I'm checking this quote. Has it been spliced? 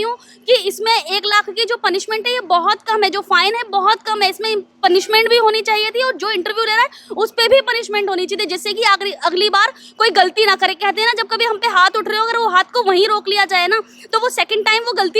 no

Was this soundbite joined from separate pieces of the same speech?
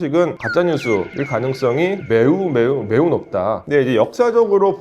yes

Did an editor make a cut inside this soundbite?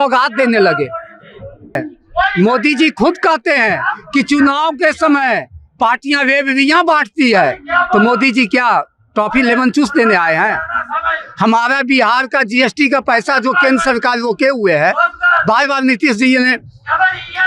yes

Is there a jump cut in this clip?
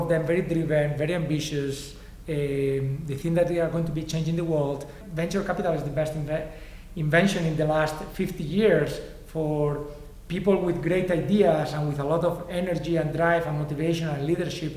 yes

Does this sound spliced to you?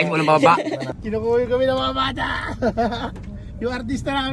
yes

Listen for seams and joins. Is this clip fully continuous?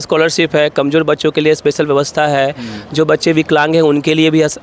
yes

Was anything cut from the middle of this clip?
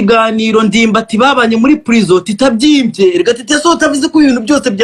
no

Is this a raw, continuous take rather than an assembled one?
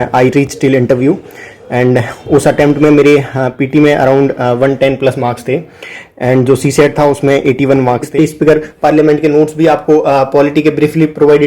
no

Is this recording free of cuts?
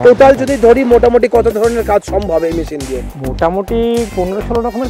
yes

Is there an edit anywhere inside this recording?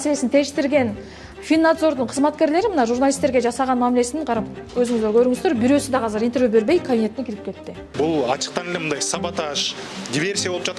yes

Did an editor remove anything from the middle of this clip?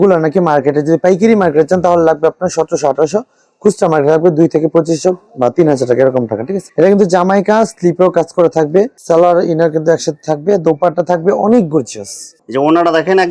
no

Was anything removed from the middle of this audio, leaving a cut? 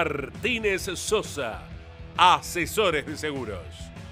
no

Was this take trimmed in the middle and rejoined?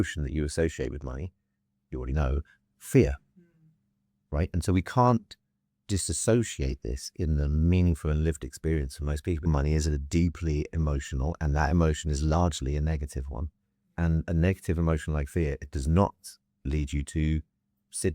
yes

